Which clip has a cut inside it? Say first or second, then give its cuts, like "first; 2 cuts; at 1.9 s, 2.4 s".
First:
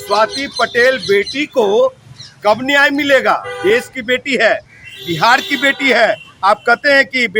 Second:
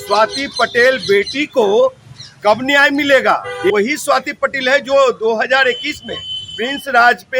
second; 1 cut; at 3.7 s